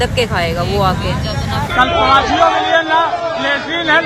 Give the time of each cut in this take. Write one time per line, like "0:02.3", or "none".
0:01.7